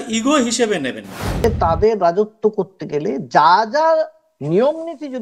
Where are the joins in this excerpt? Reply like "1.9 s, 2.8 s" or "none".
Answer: 1.4 s